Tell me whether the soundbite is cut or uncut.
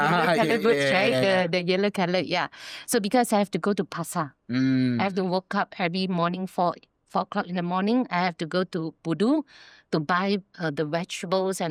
uncut